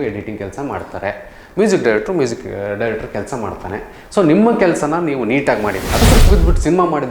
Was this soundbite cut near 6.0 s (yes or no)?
yes